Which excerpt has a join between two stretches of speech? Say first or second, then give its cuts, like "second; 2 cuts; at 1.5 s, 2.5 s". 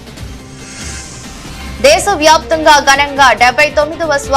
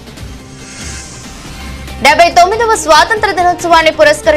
first; 1 cut; at 1.8 s